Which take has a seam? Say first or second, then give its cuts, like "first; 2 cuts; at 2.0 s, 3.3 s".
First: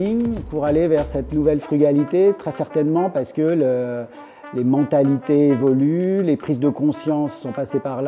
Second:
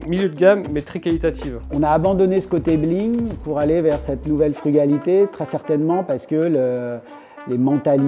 second; 1 cut; at 1.6 s